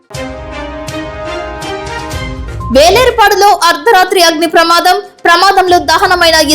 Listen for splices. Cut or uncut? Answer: cut